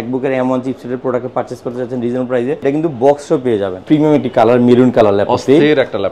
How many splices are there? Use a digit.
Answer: 2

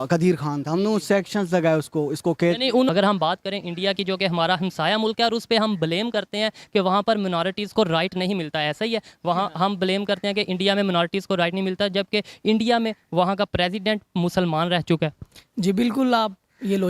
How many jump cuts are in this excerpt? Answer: 1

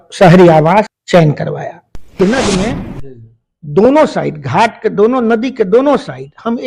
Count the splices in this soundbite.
2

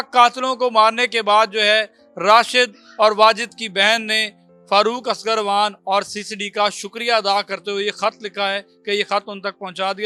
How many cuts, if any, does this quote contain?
0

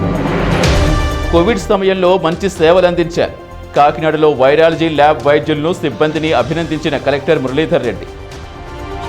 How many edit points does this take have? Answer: 1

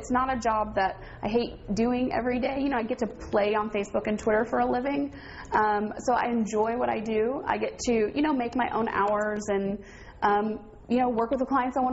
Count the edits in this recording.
0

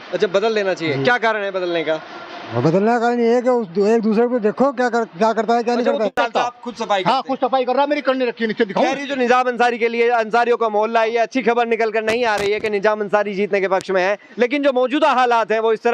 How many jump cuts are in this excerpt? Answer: 1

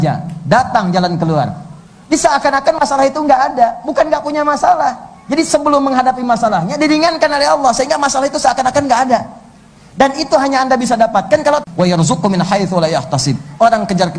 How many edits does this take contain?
1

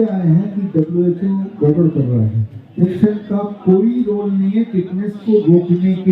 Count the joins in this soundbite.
1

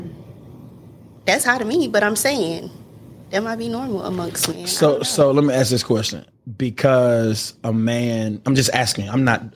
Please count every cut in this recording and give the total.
0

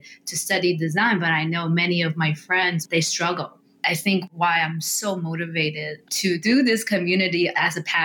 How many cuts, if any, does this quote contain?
1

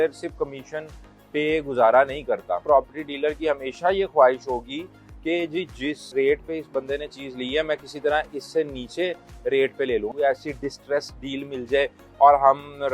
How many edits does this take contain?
2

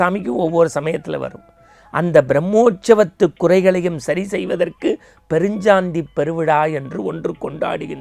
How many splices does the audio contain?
0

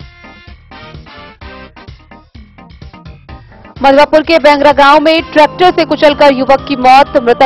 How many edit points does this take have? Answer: 2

